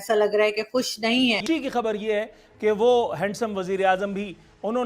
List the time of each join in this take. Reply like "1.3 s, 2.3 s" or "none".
1.4 s